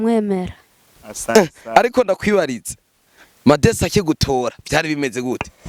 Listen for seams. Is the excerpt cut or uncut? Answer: uncut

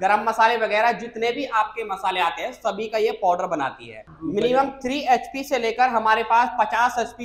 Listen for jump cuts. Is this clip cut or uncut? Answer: cut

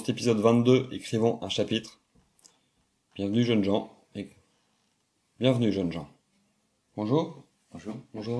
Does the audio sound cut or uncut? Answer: uncut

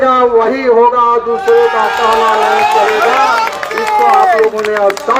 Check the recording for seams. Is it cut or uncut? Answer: uncut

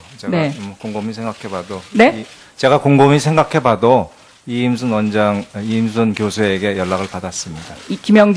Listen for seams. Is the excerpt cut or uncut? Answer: uncut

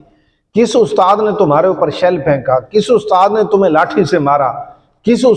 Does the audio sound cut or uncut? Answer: uncut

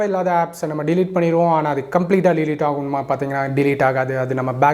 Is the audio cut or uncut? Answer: uncut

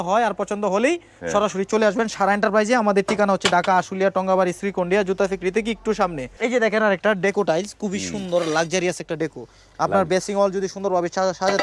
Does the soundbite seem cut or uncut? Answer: cut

